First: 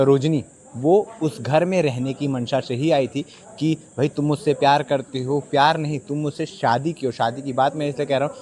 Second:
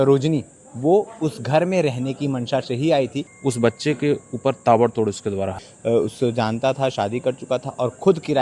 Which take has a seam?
second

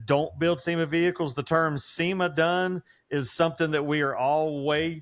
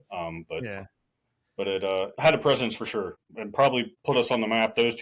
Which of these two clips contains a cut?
second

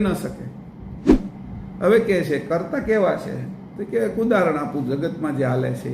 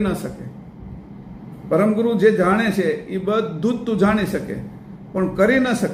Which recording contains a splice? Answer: first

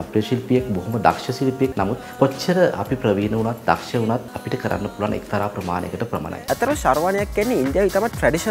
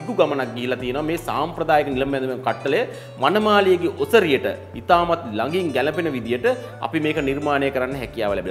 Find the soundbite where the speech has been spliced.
first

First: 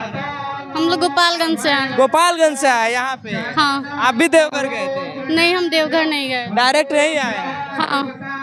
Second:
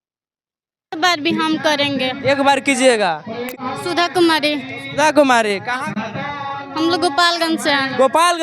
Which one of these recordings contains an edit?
second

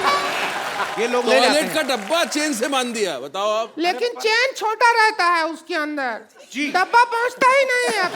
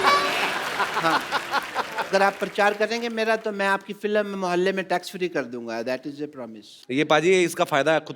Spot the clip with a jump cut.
first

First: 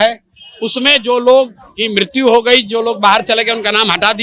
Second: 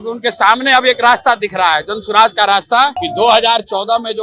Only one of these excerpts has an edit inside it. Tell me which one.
second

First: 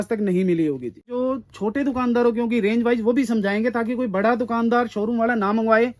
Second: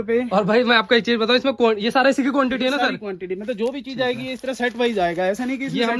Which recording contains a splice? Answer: first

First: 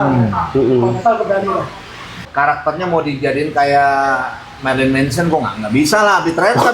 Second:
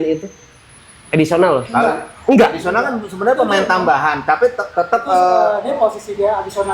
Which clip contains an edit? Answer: first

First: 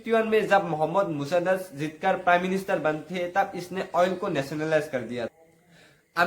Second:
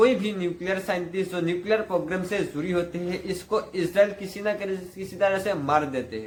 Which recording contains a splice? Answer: first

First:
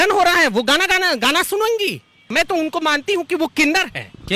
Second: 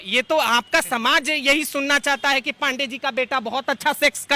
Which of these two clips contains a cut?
first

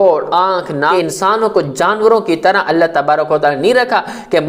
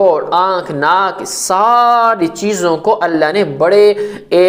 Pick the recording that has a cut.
first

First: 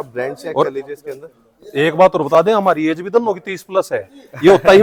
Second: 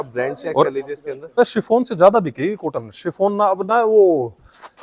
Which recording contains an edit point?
second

